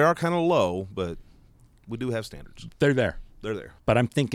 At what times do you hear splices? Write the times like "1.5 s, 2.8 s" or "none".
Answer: none